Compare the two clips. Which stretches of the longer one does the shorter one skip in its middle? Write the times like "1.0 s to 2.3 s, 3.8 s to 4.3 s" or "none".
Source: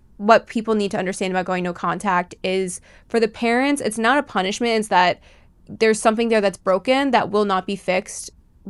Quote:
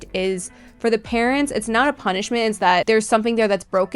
5.1 s to 5.8 s